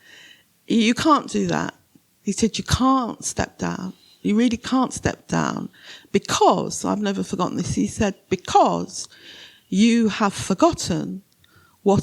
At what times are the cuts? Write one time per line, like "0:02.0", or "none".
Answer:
none